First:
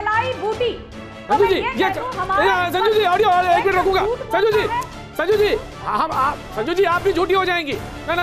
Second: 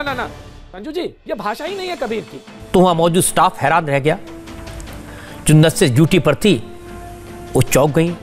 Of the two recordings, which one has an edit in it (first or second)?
second